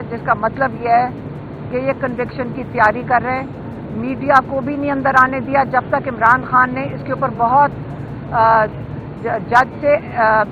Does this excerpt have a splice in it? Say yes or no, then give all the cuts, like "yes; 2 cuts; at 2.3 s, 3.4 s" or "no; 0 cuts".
no; 0 cuts